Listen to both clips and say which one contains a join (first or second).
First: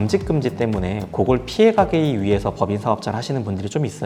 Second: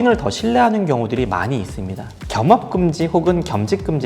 second